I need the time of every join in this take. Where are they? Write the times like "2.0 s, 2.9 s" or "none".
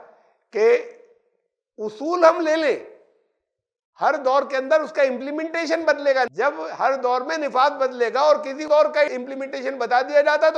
6.3 s, 8.6 s